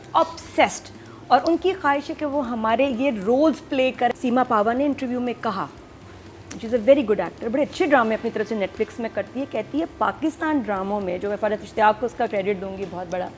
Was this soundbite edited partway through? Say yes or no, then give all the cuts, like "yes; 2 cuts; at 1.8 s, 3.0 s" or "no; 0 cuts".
yes; 1 cut; at 4.1 s